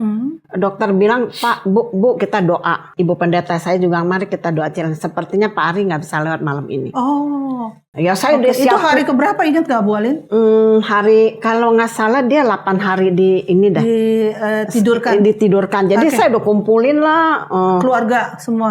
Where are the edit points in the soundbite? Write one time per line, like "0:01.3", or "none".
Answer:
0:02.9

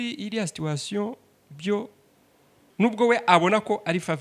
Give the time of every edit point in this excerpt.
0:02.7

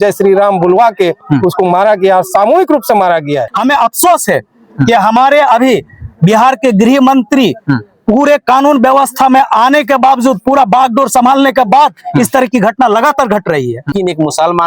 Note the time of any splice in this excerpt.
0:03.3
0:13.8

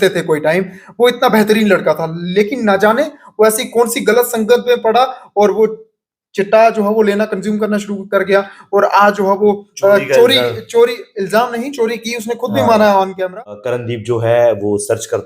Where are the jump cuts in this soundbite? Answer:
0:13.8

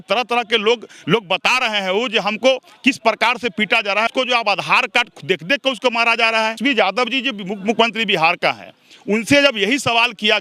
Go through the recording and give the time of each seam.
0:04.1
0:06.6

